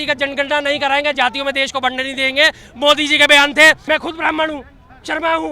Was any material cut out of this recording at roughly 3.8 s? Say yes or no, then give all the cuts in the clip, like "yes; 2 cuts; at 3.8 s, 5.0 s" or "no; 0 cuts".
yes; 1 cut; at 3.8 s